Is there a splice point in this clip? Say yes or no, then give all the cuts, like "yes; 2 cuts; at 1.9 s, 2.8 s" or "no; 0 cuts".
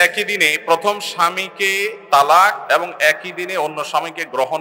yes; 1 cut; at 2.6 s